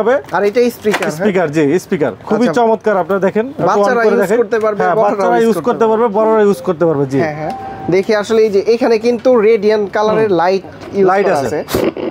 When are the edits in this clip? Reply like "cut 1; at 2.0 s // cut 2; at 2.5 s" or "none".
none